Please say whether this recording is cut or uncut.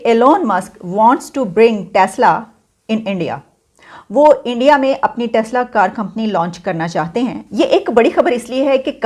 cut